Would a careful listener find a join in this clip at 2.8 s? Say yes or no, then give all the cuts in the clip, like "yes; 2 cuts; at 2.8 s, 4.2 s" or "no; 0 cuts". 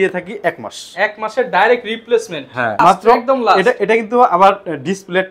yes; 1 cut; at 2.8 s